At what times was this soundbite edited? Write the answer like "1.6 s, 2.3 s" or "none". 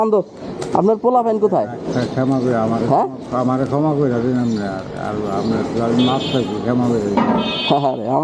none

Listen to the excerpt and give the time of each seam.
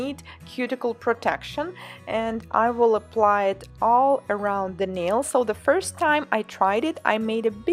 none

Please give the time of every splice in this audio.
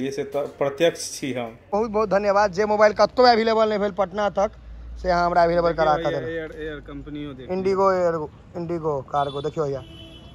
1.7 s

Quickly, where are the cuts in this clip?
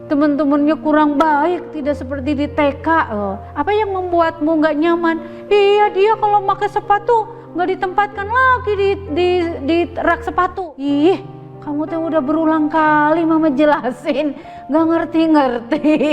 10.6 s

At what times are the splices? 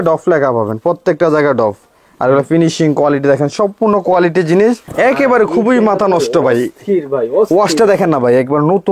4.9 s

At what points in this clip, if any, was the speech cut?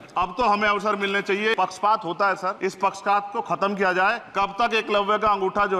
1.5 s, 2.6 s, 4.2 s

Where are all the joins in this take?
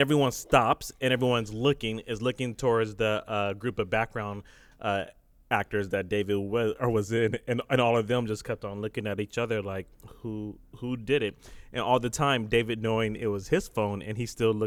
none

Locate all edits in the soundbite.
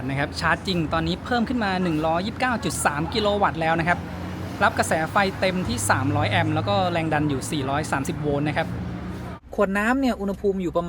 9.4 s

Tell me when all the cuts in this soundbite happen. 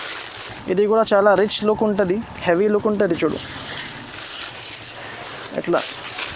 none

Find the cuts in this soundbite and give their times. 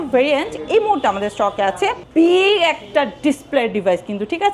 2.0 s

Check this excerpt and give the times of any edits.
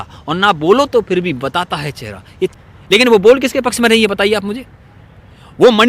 2.6 s

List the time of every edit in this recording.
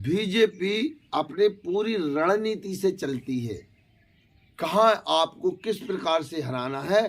none

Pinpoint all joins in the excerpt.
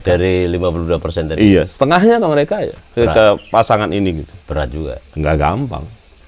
none

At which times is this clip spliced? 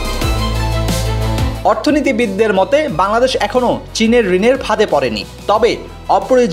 1.3 s

